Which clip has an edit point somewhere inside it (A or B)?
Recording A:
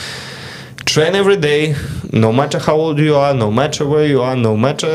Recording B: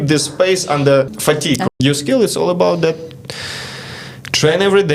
B